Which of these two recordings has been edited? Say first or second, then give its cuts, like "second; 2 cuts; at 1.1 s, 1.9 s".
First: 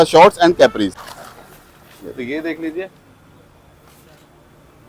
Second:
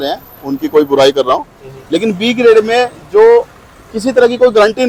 first; 1 cut; at 1.1 s